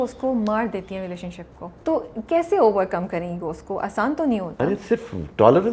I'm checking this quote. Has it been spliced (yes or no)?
yes